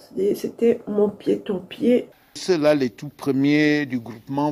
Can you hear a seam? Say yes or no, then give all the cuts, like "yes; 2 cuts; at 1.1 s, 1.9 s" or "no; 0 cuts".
yes; 1 cut; at 2.4 s